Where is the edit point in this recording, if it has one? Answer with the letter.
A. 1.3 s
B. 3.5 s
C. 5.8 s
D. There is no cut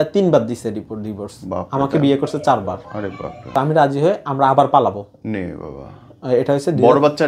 B